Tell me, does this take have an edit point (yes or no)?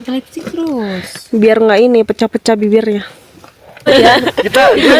yes